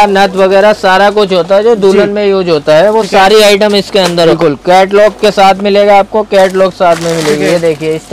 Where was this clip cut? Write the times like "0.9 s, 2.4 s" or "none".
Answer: 4.3 s